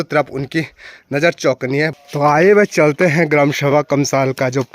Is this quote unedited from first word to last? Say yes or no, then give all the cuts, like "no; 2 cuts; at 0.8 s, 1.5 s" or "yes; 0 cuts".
no; 1 cut; at 1.9 s